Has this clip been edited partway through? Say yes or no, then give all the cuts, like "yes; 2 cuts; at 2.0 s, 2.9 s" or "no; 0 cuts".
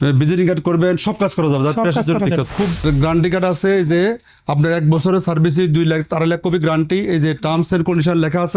yes; 1 cut; at 2.8 s